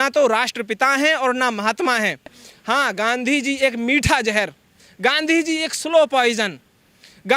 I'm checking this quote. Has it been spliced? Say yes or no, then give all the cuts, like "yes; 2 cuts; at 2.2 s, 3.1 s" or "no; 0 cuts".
no; 0 cuts